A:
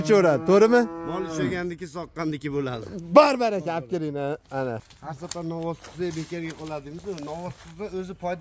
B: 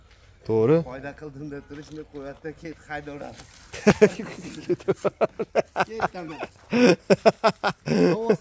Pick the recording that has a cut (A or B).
A